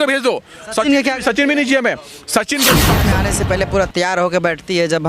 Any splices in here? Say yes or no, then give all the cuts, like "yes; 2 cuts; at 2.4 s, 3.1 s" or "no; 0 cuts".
yes; 1 cut; at 3.0 s